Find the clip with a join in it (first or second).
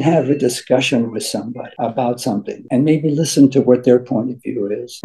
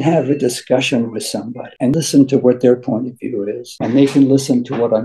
second